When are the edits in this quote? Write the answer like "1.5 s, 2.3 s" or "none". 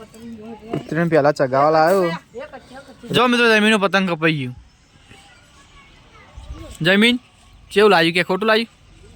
3.1 s